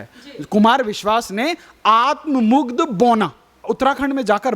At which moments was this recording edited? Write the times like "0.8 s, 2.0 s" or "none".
3.6 s